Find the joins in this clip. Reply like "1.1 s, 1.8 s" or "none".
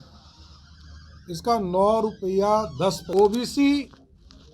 3.0 s